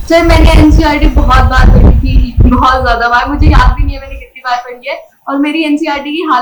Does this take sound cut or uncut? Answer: uncut